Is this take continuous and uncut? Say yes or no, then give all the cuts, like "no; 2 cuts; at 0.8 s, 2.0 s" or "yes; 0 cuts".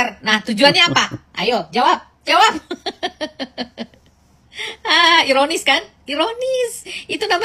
yes; 0 cuts